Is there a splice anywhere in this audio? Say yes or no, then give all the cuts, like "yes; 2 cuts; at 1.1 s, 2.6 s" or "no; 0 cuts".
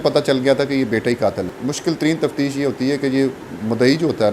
yes; 1 cut; at 1.5 s